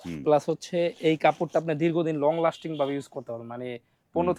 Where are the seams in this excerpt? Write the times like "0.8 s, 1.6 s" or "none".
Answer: none